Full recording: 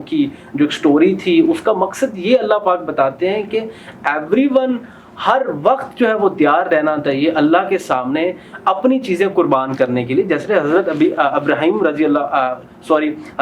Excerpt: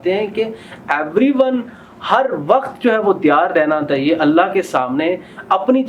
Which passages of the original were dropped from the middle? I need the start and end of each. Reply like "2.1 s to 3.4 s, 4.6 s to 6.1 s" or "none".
none